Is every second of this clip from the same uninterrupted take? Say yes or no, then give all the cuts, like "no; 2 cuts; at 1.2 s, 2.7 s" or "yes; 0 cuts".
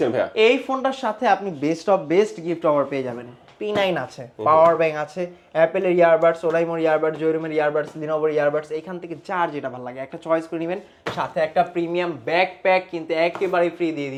yes; 0 cuts